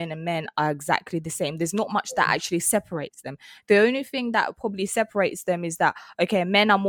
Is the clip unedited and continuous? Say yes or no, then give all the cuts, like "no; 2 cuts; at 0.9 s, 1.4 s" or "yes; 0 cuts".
yes; 0 cuts